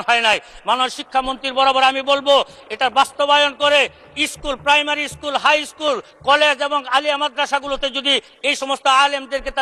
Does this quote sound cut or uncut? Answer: uncut